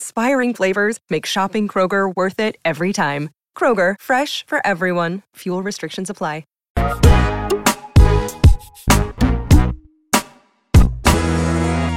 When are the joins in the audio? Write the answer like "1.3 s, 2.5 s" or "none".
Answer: 6.6 s